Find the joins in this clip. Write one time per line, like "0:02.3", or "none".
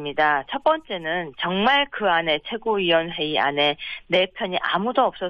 0:04.2